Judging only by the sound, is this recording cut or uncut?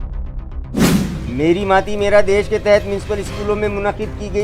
cut